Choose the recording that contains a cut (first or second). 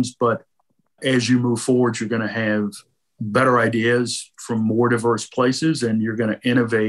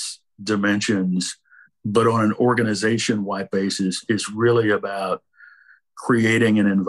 second